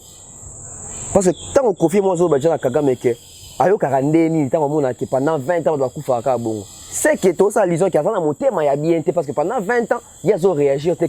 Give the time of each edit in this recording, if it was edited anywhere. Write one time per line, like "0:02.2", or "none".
none